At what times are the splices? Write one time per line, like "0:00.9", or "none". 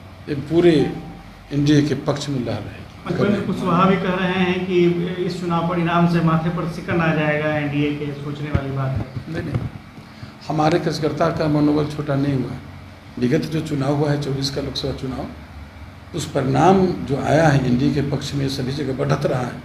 0:03.1
0:13.2